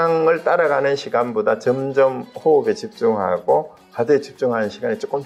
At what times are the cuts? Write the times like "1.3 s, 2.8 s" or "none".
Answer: none